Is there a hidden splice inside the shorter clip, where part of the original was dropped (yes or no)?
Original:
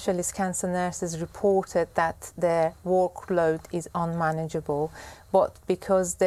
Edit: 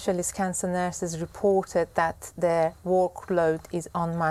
no